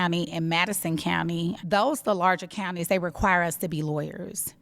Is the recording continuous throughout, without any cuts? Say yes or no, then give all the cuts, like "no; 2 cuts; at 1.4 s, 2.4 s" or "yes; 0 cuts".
no; 1 cut; at 1.6 s